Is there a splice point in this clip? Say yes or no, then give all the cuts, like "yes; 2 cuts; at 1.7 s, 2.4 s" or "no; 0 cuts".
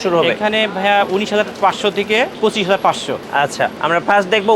yes; 2 cuts; at 2.3 s, 3.4 s